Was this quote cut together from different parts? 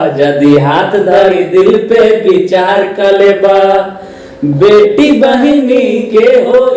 no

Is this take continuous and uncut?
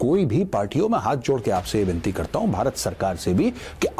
yes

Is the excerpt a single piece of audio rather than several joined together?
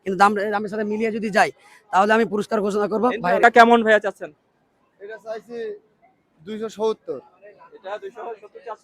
no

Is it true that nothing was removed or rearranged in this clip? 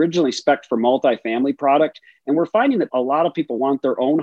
no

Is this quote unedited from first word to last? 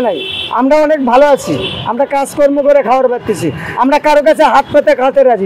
yes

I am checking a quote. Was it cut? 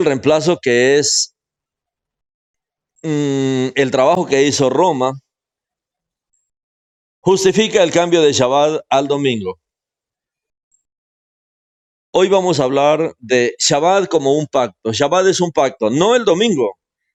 no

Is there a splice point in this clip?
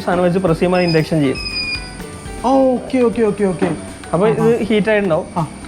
no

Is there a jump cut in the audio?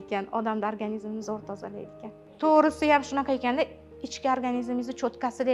no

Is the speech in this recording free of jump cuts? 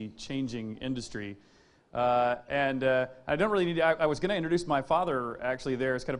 yes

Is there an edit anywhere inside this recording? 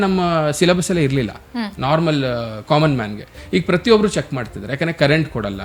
no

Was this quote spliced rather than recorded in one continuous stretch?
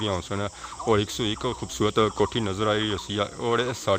no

